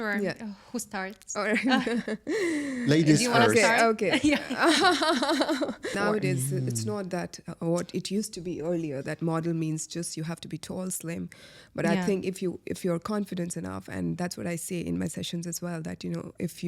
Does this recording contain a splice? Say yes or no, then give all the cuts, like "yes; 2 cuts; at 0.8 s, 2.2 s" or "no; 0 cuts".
yes; 1 cut; at 5.9 s